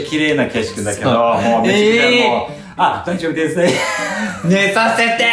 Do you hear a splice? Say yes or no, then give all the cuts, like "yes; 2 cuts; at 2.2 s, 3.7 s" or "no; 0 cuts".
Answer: no; 0 cuts